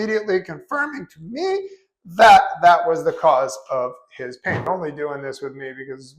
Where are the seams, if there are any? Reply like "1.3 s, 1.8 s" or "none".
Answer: 4.6 s

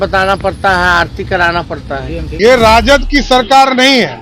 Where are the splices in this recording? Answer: 2.3 s

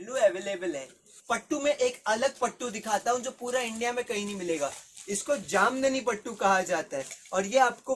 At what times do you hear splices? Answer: 1.2 s

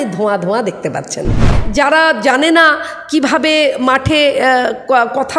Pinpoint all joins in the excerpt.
1.6 s

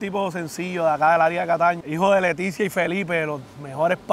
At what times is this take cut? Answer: 1.8 s

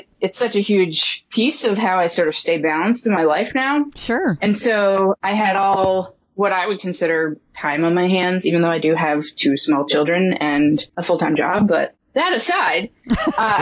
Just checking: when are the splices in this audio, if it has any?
10.9 s

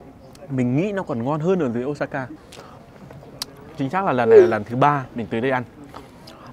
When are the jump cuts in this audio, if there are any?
2.3 s

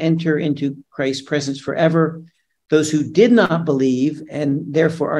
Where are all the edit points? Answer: none

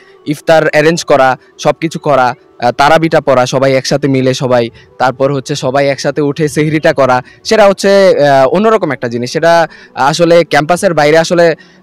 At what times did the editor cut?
none

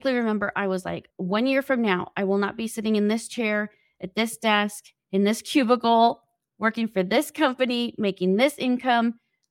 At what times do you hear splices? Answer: 1.1 s

